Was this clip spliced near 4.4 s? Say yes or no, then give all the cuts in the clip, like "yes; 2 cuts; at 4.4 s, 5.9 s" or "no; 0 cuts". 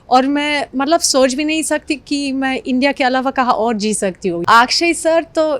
yes; 1 cut; at 4.4 s